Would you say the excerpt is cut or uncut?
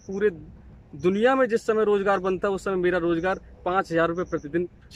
uncut